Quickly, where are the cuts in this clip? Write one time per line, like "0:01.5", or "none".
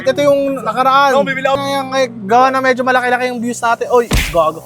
0:01.6